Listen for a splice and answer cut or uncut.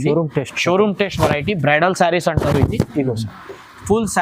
uncut